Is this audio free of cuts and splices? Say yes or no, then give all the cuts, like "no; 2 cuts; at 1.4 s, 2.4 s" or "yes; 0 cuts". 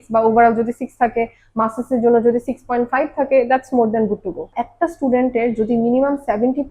no; 1 cut; at 4.5 s